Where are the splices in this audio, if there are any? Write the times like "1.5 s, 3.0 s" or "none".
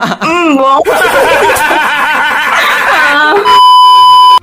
3.5 s

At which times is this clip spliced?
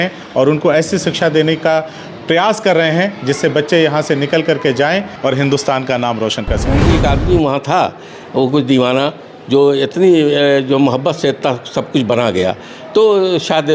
5.1 s, 6.8 s

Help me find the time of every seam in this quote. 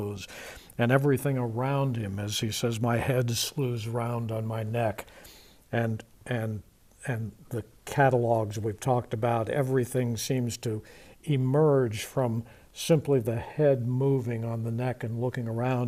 none

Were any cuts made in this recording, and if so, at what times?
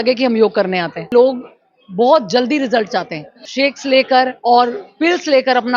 1.1 s, 3.5 s

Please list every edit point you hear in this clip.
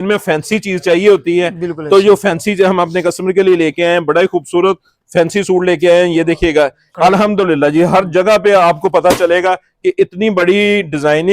6.9 s

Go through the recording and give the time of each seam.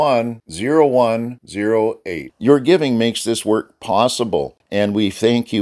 4.6 s

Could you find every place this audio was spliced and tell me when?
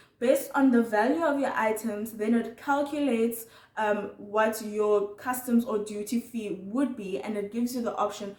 none

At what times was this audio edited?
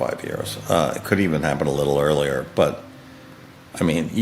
none

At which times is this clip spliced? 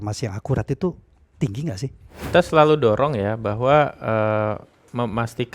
2.3 s

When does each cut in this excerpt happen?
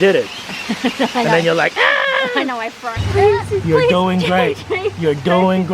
2.9 s

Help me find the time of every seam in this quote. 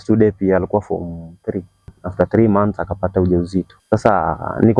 2.0 s, 3.8 s

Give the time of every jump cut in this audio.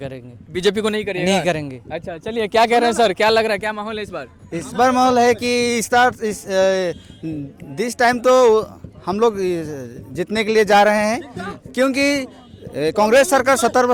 none

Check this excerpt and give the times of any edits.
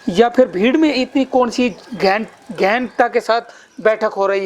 none

